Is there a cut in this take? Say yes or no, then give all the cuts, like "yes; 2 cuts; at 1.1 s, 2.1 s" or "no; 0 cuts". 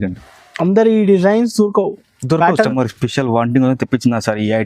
yes; 1 cut; at 2.7 s